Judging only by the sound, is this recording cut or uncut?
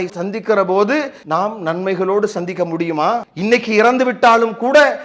cut